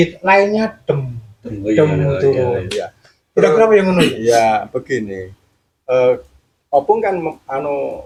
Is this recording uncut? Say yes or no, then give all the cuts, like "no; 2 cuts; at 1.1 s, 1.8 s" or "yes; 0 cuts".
yes; 0 cuts